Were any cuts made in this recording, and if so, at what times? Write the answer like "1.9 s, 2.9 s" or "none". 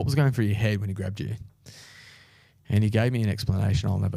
none

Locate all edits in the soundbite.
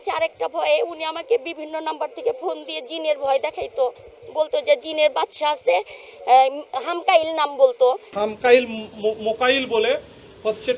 8.1 s

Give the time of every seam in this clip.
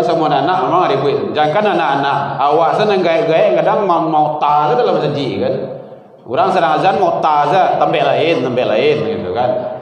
none

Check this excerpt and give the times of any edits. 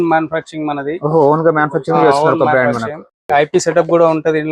none

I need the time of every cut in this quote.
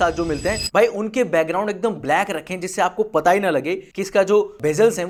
none

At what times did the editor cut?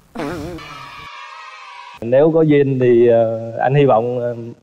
1.8 s

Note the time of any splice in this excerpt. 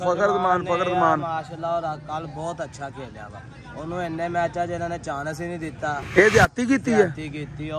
6.0 s

